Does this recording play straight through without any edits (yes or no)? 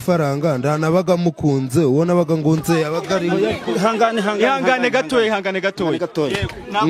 yes